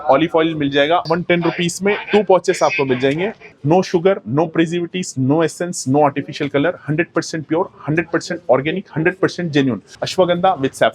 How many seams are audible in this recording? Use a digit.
3